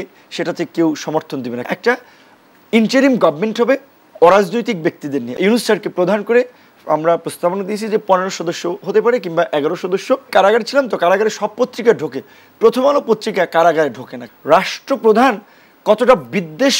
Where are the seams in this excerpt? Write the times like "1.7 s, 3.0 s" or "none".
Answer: 1.7 s, 5.3 s, 10.3 s, 14.2 s